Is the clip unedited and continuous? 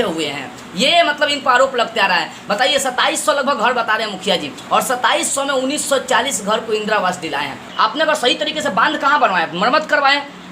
no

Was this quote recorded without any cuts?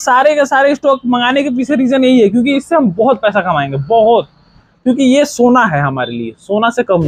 yes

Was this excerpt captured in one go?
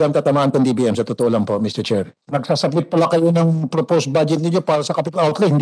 no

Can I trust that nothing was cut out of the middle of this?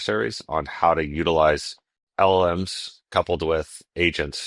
no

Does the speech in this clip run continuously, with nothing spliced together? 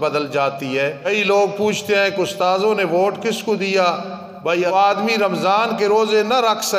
no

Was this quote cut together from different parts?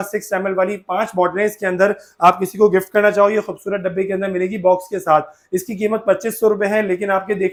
no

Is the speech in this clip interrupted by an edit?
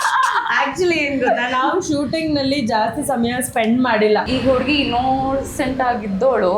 yes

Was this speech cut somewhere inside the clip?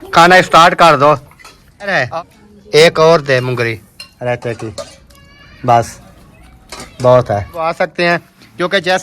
yes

